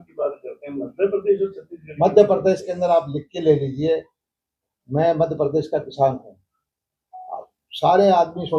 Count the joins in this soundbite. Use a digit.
0